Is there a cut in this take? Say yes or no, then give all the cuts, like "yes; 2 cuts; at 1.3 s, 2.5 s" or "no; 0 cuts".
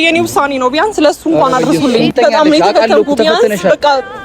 yes; 1 cut; at 2.1 s